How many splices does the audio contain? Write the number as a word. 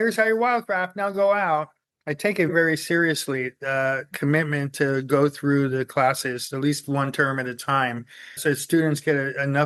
zero